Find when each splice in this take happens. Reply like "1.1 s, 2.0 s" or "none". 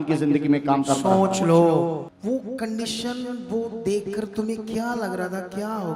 2.0 s